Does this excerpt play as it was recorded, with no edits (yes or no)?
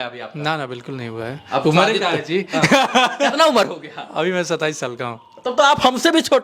yes